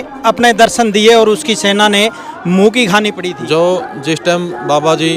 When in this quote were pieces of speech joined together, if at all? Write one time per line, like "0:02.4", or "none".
0:03.2